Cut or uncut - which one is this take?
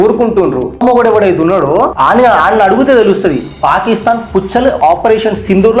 cut